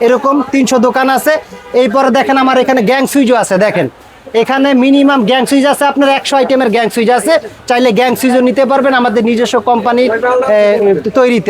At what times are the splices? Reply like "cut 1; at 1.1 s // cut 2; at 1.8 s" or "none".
none